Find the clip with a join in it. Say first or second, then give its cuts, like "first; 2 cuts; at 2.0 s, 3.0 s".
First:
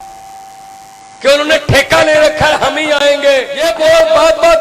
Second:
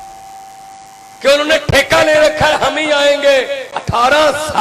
first; 1 cut; at 3.5 s